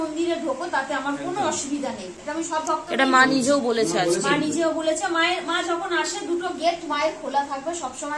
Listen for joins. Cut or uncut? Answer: uncut